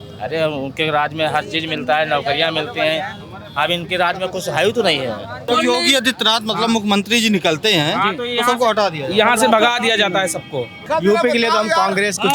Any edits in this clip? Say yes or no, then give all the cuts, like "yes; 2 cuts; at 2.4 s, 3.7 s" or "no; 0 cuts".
yes; 2 cuts; at 5.4 s, 10.9 s